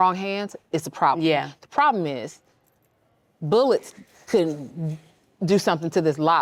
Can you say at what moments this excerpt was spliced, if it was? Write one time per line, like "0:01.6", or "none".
none

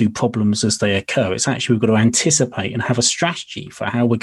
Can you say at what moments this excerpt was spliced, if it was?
none

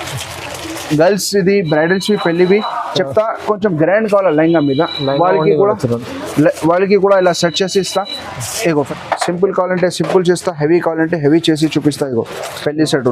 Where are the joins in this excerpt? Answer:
0:08.9

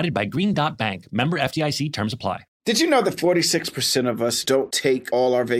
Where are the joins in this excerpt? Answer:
0:02.5

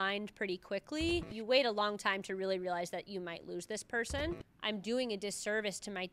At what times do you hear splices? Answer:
0:01.3
0:04.4

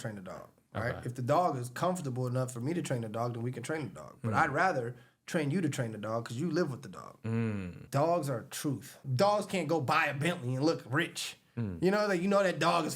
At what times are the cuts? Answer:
0:07.8
0:09.1

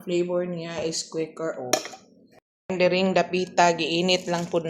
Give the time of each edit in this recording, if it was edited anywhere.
0:02.4

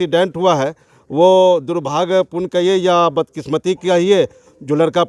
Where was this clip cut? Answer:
none

